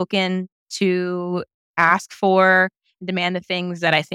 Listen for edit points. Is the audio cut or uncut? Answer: uncut